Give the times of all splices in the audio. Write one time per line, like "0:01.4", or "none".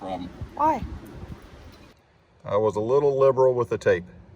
0:01.9